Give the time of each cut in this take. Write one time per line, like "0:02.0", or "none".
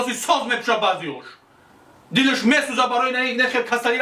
none